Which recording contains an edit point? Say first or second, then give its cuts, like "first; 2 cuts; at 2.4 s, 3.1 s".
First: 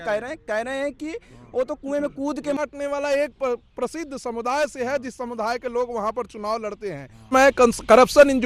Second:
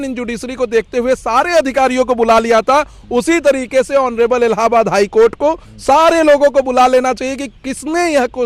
first; 2 cuts; at 2.6 s, 7.3 s